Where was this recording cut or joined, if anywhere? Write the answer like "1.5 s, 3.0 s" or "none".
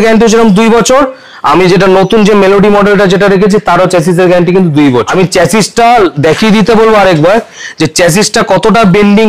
none